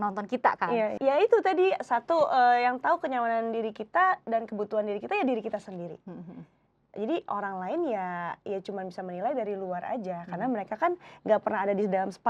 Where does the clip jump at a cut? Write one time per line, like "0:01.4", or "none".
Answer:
0:00.9